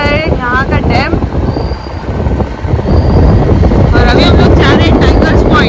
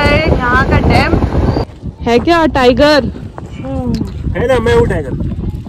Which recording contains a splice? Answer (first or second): second